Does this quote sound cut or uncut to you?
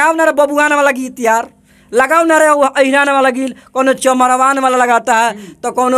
uncut